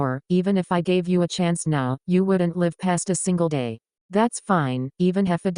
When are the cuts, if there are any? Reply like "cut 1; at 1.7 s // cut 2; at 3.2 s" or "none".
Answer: cut 1; at 4.1 s